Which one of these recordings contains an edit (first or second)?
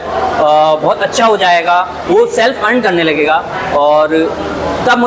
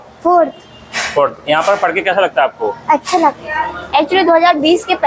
second